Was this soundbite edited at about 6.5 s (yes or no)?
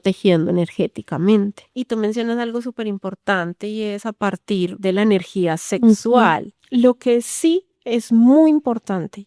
yes